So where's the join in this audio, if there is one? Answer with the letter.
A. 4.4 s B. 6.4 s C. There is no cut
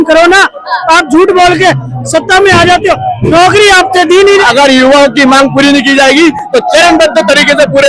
A